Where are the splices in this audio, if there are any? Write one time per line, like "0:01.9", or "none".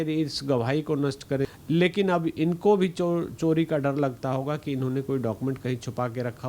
0:01.4